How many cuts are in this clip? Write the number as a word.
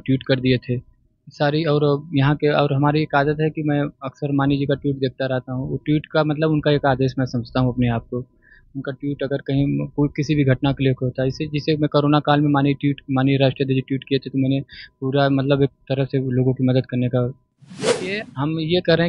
one